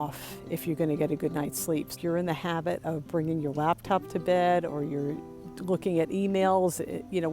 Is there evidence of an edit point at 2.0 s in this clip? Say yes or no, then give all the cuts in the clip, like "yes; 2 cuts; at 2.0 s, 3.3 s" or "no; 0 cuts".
yes; 1 cut; at 2.0 s